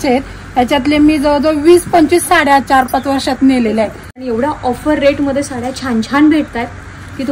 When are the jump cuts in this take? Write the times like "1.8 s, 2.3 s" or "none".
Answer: 4.2 s